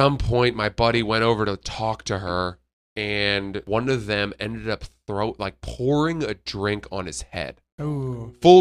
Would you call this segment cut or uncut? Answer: cut